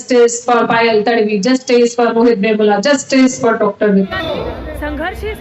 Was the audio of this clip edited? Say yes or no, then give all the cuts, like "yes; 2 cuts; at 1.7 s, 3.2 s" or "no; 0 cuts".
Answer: yes; 1 cut; at 4.1 s